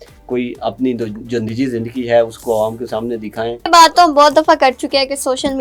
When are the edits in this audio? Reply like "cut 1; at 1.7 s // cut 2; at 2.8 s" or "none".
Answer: cut 1; at 3.7 s